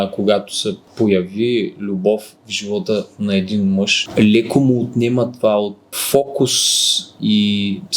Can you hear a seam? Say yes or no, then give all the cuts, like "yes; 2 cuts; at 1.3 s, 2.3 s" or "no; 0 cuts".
yes; 2 cuts; at 4.1 s, 5.8 s